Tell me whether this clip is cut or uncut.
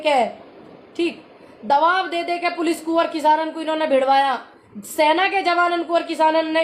uncut